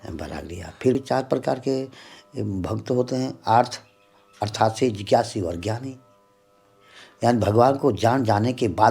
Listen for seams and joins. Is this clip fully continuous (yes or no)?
no